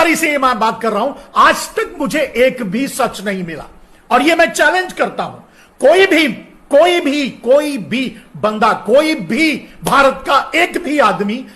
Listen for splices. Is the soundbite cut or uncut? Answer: uncut